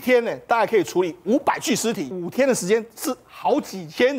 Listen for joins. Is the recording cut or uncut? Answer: cut